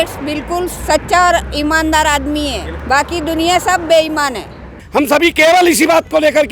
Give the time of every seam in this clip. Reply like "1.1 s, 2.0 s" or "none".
4.8 s